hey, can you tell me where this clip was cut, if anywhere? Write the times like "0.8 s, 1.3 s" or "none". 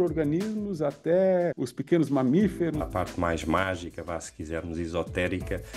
1.7 s, 2.9 s